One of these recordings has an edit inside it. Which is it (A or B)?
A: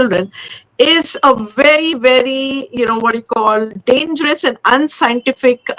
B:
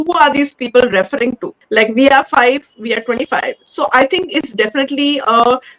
B